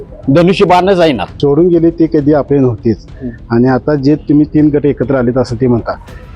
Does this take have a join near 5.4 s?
no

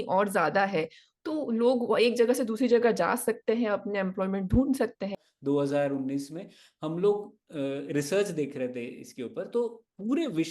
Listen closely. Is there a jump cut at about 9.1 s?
no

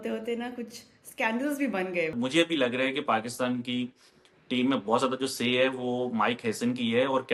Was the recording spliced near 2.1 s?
yes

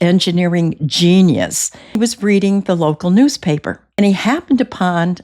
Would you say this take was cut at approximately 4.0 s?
yes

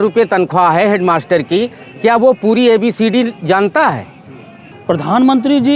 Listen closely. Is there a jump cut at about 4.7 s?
yes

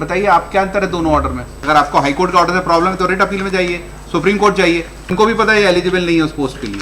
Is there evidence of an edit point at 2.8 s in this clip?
no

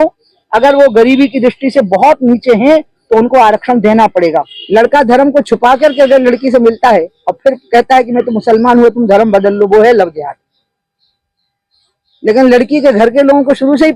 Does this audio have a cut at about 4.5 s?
yes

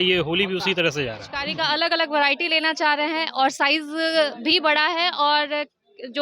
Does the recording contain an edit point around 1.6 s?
yes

